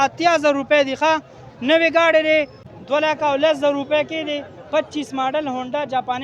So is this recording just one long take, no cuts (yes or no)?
no